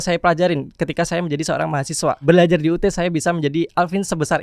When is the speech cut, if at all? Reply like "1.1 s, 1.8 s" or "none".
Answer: 2.2 s